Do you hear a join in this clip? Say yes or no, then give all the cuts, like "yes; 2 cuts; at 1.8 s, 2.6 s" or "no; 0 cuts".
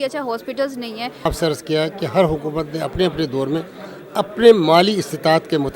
yes; 1 cut; at 1.2 s